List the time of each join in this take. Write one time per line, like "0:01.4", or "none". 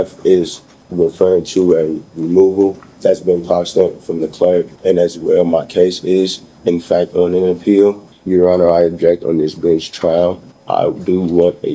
0:02.9
0:04.7
0:08.1
0:10.5